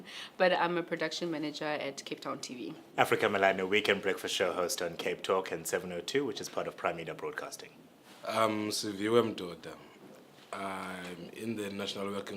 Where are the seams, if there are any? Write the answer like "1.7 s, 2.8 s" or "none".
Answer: 9.1 s